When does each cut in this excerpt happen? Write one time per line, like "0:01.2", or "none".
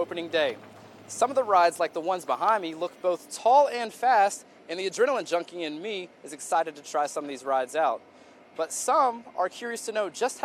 none